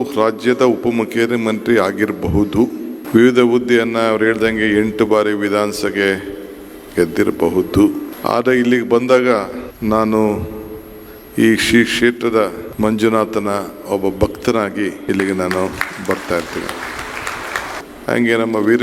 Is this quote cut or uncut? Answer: cut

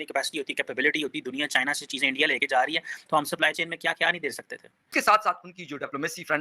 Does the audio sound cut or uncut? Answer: cut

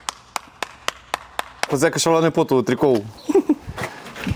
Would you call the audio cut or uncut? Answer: cut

